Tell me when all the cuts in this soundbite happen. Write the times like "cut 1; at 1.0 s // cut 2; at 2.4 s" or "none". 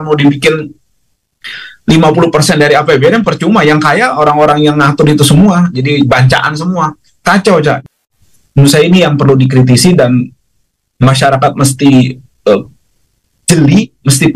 cut 1; at 7.9 s